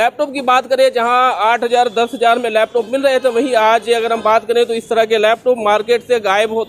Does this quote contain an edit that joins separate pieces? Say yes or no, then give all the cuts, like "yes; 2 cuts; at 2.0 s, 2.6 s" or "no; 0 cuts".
no; 0 cuts